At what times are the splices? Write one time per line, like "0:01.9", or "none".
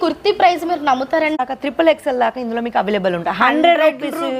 0:01.4

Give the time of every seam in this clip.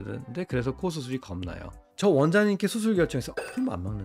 0:01.9

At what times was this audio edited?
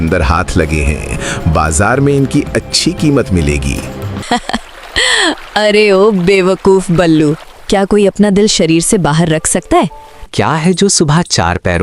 0:04.3
0:10.3

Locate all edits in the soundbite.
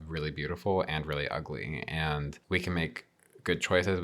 0:02.4

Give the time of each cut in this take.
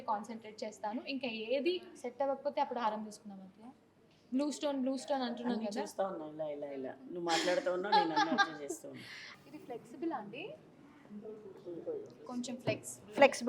none

